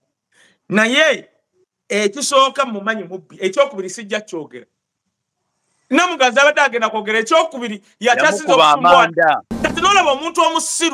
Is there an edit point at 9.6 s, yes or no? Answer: yes